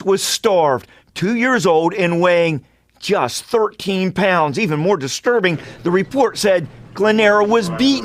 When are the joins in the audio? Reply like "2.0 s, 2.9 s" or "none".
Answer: none